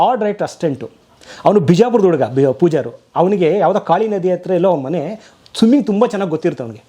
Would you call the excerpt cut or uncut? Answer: uncut